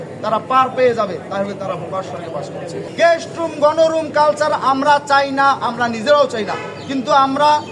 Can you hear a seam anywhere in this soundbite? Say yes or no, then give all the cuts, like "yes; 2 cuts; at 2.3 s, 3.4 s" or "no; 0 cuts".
no; 0 cuts